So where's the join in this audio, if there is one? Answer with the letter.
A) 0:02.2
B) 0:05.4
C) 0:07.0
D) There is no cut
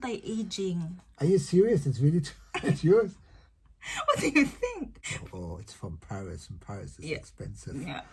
B